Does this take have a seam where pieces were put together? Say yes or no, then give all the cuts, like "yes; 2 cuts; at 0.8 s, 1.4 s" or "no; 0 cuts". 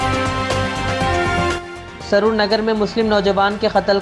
yes; 1 cut; at 1.5 s